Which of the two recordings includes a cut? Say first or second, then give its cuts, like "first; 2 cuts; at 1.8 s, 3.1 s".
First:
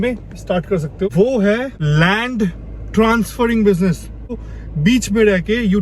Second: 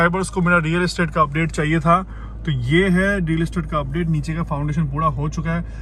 first; 3 cuts; at 1.1 s, 1.7 s, 4.4 s